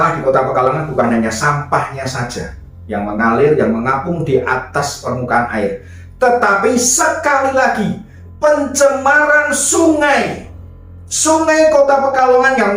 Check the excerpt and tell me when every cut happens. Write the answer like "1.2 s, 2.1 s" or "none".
none